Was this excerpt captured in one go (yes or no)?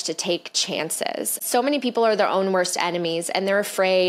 no